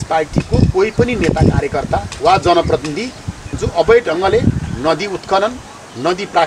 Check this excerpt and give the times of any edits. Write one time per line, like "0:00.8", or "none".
0:03.6